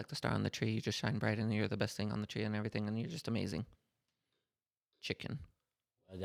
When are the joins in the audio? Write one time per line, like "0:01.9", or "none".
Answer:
none